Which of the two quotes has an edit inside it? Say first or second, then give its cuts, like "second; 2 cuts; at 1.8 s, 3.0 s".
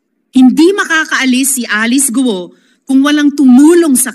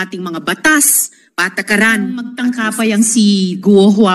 second; 1 cut; at 2.3 s